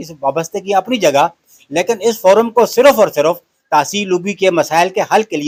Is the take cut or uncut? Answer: uncut